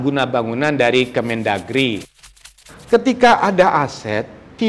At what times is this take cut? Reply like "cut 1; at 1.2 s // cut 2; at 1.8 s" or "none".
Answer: cut 1; at 2.2 s